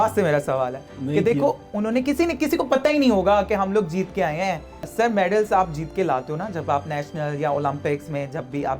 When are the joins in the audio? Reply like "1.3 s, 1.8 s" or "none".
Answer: 4.9 s